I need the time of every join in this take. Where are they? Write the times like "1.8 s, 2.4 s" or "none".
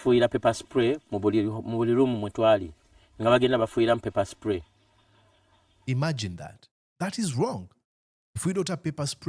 none